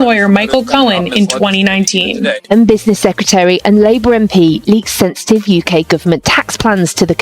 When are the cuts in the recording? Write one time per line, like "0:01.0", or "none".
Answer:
0:02.5